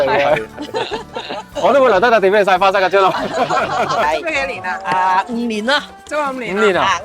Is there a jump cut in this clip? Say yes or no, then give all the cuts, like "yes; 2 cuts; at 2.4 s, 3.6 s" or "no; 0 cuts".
yes; 1 cut; at 4.0 s